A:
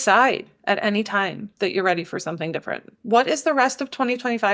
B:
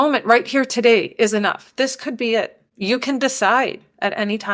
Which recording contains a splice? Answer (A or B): A